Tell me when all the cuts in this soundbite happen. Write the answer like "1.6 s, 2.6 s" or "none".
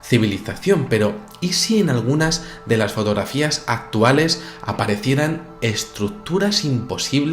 4.6 s